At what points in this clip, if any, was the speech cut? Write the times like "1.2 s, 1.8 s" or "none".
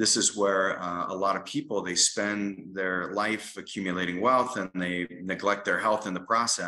none